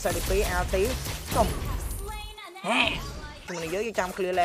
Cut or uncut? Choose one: cut